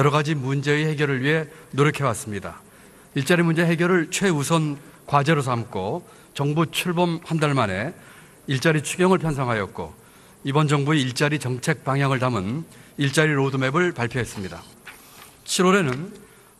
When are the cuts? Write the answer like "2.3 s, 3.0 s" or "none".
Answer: none